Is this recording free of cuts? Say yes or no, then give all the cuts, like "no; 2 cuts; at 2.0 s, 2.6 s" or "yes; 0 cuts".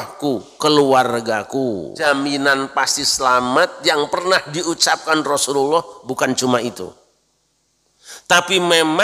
no; 1 cut; at 1.9 s